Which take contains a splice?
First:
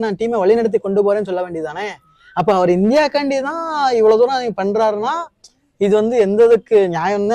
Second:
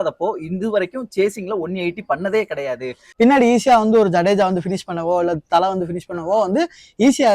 second; 1 cut; at 3.0 s

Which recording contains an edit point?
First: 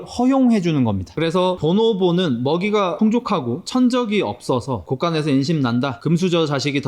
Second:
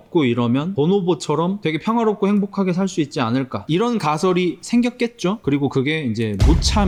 first; 1 cut; at 1.0 s

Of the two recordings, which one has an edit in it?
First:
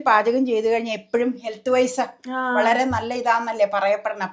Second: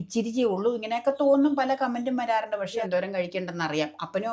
second; 1 cut; at 2.7 s

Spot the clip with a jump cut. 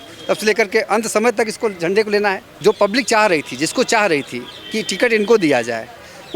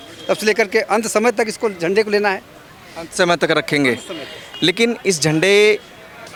first; 1 cut; at 2.5 s

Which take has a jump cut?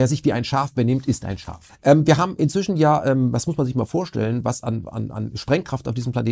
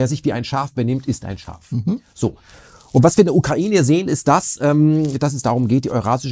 first; 1 cut; at 1.7 s

